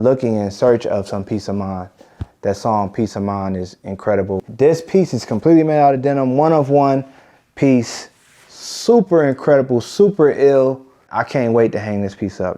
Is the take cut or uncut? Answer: cut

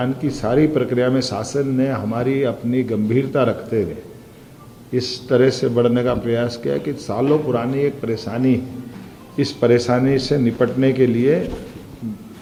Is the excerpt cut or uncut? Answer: uncut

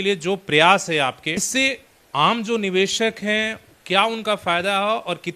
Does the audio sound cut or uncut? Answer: cut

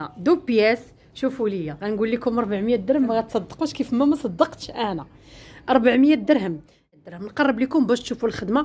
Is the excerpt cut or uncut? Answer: cut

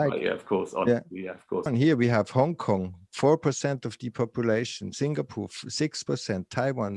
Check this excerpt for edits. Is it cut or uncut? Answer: cut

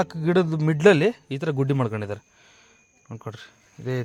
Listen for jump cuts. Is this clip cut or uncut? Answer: uncut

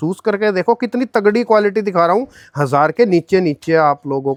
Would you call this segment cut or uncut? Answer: uncut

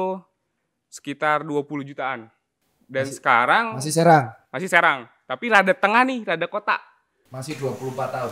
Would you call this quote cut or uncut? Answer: cut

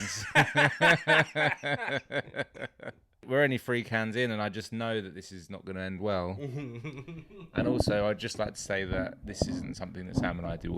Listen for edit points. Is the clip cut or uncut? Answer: cut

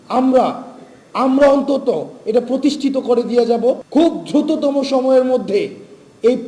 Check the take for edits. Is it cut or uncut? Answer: cut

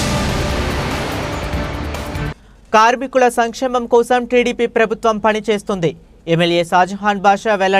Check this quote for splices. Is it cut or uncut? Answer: cut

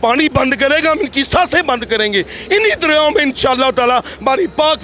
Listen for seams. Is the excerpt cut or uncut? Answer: uncut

